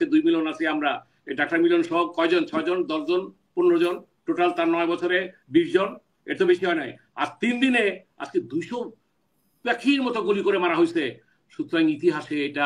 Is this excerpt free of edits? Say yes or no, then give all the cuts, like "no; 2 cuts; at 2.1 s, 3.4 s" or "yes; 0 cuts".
yes; 0 cuts